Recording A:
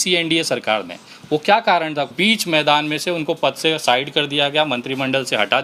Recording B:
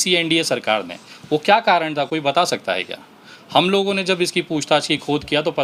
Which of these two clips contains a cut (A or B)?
A